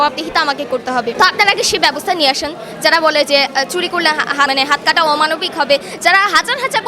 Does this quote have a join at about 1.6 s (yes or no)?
no